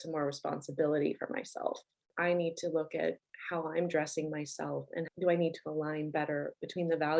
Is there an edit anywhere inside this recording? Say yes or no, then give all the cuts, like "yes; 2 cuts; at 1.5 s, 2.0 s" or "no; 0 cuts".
no; 0 cuts